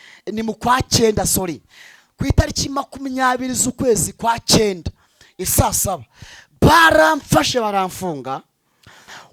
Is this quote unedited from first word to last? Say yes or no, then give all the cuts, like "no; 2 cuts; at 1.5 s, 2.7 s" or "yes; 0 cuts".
yes; 0 cuts